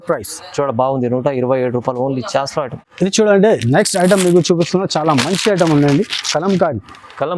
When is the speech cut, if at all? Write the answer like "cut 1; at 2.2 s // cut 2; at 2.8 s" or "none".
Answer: cut 1; at 2.8 s